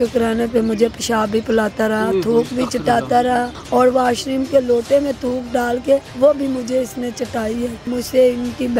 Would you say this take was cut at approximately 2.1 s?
no; 3 cuts; at 3.6 s, 6.1 s, 7.8 s

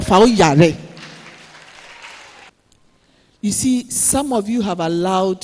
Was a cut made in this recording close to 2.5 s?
yes; 1 cut; at 2.5 s

